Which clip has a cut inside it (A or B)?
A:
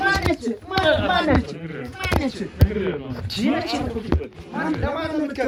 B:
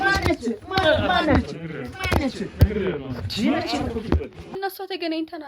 B